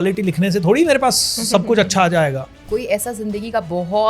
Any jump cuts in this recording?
yes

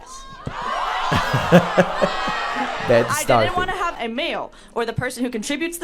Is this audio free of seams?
no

